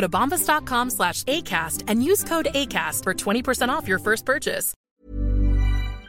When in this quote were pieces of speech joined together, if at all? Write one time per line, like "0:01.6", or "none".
0:04.8